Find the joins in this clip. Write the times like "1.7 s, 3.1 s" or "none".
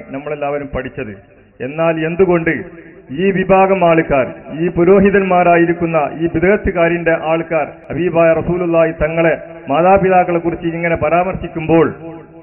7.8 s

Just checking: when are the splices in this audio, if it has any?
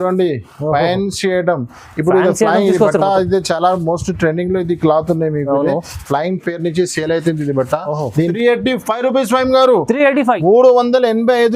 8.3 s

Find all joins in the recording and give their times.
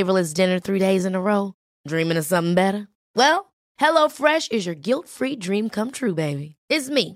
none

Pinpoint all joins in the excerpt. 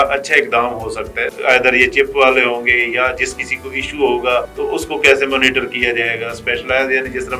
1.2 s, 4.5 s

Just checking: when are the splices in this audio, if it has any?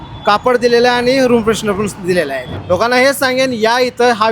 2.5 s

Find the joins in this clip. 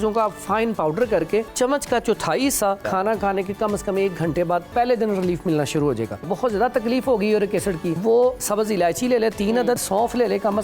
1.5 s, 2.8 s, 4.7 s, 6.2 s, 7.9 s, 9.8 s

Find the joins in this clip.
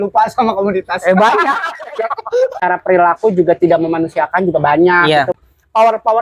2.6 s, 5.3 s

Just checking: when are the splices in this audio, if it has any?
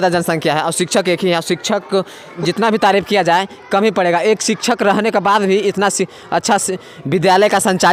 none

